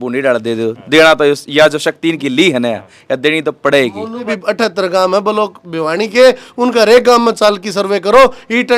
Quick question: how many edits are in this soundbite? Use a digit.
1